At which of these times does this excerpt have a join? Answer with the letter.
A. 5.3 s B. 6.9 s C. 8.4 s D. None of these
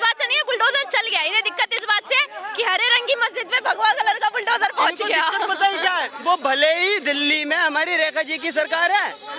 D